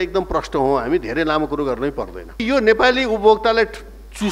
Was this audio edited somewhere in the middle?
yes; 1 cut; at 2.4 s

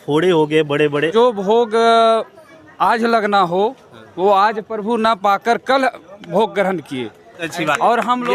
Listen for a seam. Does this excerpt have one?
yes; 2 cuts; at 1.1 s, 7.5 s

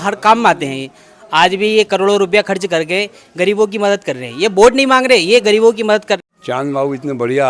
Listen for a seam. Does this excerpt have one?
yes; 1 cut; at 6.2 s

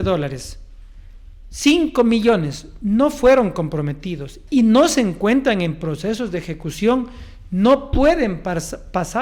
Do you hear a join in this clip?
no; 0 cuts

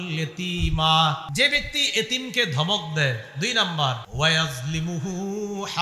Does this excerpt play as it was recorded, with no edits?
no; 2 cuts; at 1.3 s, 4.1 s

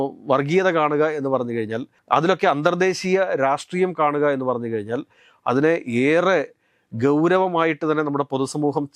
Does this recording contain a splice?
no; 0 cuts

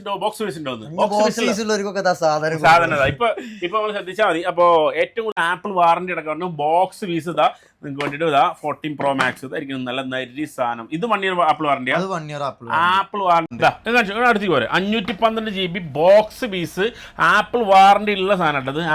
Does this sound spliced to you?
yes; 2 cuts; at 5.4 s, 13.5 s

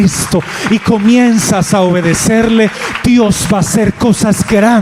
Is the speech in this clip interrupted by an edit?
no; 0 cuts

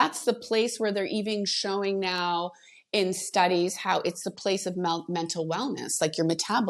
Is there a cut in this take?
no; 0 cuts

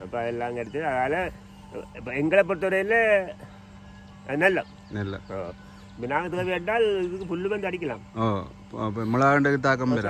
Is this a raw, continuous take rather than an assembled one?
yes; 0 cuts

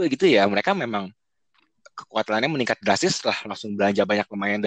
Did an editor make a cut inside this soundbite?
no; 0 cuts

